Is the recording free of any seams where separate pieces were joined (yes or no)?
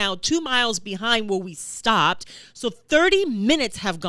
yes